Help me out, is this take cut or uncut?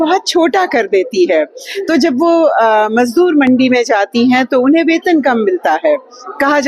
uncut